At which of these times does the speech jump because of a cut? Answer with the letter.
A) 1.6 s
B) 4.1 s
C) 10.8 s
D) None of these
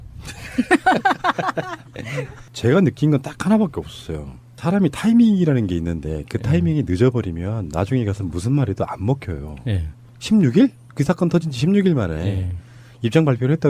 A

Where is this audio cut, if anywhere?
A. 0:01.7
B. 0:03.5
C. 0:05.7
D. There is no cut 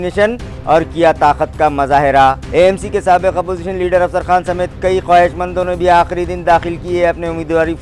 D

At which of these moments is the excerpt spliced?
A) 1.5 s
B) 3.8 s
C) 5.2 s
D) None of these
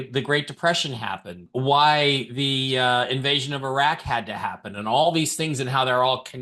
A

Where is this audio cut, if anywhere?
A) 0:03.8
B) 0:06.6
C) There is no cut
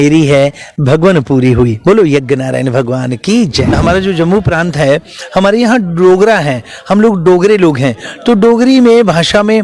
A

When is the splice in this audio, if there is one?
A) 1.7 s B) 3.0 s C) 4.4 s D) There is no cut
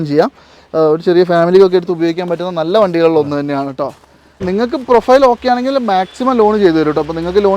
C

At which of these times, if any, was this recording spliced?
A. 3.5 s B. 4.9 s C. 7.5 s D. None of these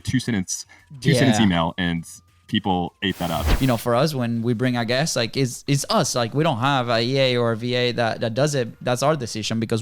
A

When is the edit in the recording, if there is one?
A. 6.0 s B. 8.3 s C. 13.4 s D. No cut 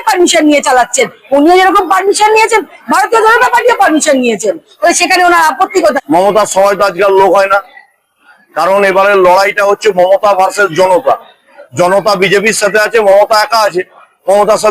A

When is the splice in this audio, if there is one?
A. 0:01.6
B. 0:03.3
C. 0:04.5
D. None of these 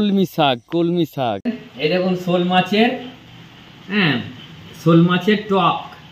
A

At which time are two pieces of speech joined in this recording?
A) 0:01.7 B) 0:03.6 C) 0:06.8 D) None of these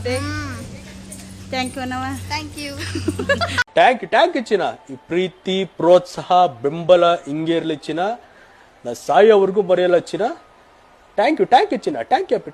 B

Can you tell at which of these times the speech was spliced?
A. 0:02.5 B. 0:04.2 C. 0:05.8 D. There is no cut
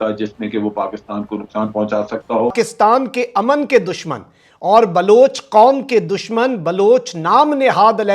A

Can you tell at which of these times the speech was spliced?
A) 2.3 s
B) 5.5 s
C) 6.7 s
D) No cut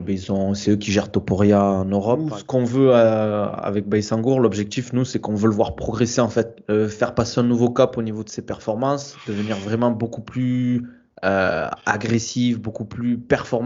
A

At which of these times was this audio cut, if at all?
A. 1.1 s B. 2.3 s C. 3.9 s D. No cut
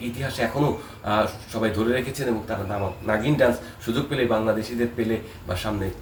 D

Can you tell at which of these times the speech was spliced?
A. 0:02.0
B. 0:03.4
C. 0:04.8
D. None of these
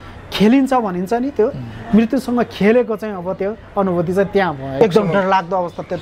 C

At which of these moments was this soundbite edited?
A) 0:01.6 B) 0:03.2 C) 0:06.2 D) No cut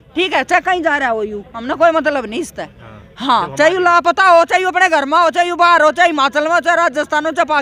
D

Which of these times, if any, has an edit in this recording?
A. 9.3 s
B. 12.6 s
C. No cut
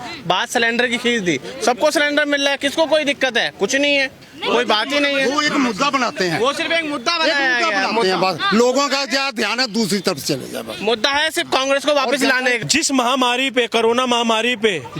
B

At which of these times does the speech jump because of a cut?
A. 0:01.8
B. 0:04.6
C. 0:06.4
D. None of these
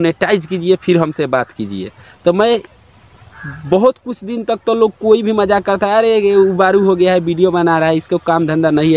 D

